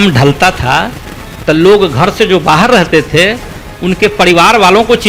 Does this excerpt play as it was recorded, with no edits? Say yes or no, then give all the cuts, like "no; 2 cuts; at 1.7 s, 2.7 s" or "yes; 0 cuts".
yes; 0 cuts